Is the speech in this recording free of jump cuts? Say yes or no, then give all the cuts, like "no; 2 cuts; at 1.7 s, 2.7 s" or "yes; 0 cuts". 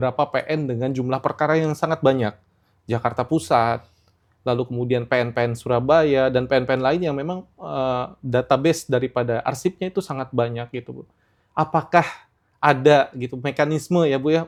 yes; 0 cuts